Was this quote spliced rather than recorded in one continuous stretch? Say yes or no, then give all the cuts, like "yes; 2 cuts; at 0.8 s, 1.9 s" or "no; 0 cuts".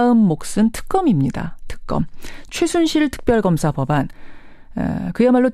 yes; 1 cut; at 1.4 s